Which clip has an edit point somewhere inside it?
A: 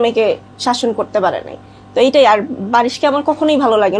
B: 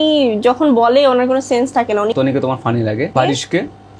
B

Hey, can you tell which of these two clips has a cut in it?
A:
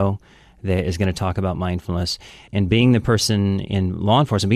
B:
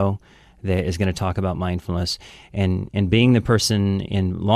A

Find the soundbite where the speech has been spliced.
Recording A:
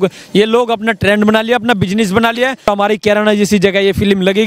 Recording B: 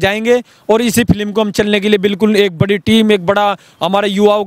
A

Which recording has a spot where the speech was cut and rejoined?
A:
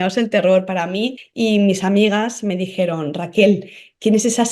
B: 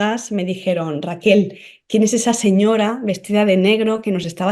A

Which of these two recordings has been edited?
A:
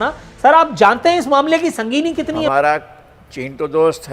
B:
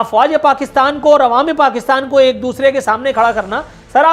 A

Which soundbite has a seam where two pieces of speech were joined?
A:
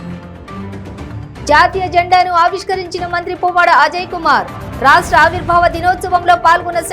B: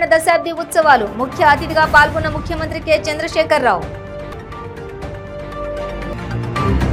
A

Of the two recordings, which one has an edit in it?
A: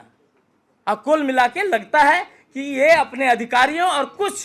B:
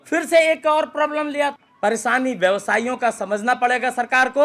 B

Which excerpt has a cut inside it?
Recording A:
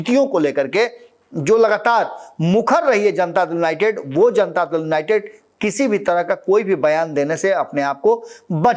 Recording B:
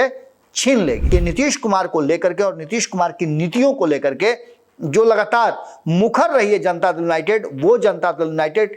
B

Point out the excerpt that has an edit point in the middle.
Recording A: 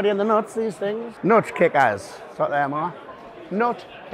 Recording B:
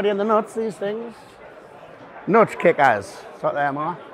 A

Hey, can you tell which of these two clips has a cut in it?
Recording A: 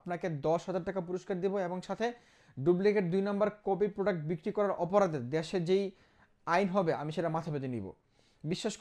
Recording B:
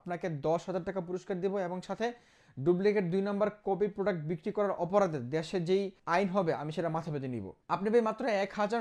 B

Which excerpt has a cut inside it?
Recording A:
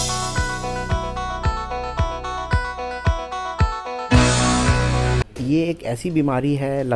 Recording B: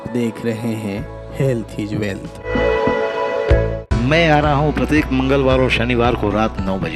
A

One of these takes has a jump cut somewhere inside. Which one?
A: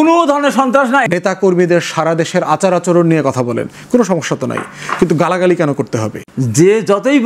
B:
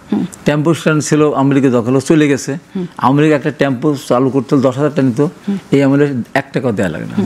A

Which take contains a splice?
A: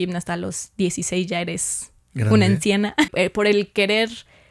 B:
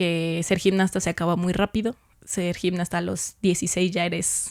A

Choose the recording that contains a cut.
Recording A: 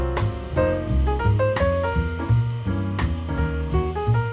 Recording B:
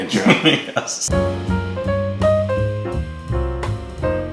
B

